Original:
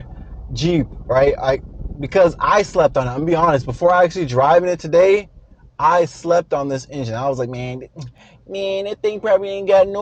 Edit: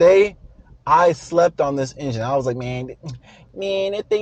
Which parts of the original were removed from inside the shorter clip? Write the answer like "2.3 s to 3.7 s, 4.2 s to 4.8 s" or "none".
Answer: none